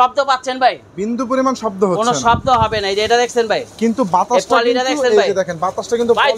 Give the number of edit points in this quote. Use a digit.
0